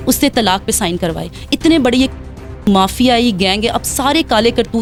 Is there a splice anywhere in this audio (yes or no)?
no